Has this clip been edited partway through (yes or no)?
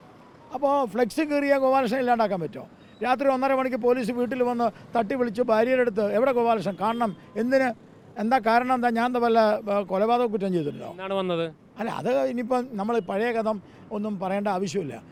no